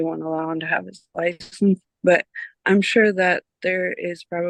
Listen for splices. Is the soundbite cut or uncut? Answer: uncut